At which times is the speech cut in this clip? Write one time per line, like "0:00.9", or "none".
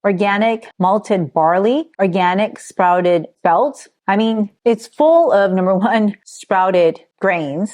none